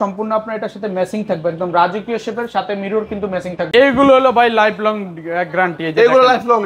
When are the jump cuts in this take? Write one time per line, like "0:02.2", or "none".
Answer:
0:03.7